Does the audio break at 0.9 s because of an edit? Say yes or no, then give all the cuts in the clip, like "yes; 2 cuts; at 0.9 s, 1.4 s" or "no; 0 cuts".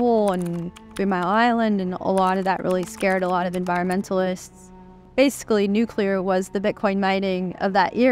no; 1 cut; at 5.0 s